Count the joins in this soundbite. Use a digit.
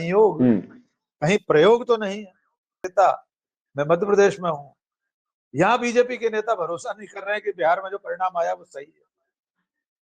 1